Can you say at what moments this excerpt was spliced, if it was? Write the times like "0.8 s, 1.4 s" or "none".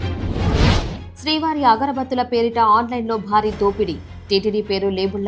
none

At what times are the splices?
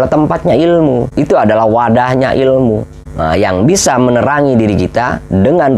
1.1 s

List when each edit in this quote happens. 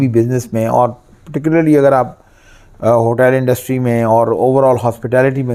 none

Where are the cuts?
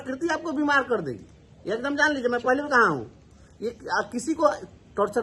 none

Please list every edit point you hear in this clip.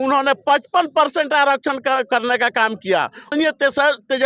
3.3 s

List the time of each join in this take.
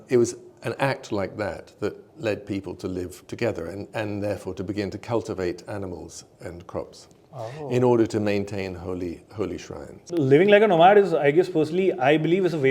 10.0 s

